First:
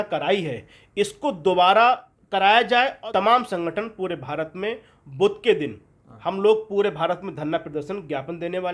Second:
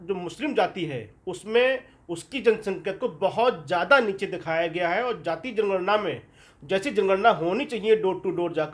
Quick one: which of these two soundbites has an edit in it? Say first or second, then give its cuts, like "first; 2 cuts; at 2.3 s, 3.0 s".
first; 2 cuts; at 2.1 s, 3.0 s